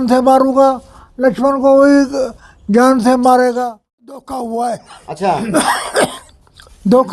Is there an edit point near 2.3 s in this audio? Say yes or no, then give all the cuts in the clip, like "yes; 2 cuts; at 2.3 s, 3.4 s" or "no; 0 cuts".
no; 1 cut; at 3.8 s